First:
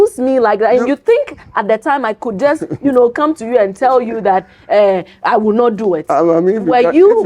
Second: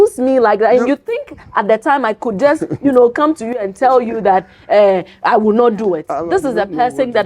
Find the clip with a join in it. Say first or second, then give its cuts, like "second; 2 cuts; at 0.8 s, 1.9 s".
second; 1 cut; at 6.1 s